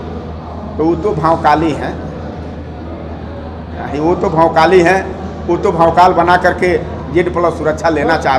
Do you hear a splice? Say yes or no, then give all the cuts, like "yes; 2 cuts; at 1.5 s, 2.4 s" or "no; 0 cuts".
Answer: no; 0 cuts